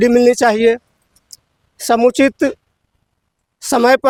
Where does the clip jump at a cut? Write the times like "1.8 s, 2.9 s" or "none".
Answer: none